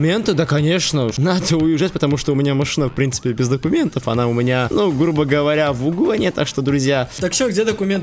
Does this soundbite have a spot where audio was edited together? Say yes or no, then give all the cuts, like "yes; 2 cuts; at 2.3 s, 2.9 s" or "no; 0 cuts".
yes; 3 cuts; at 1.1 s, 4.7 s, 7.1 s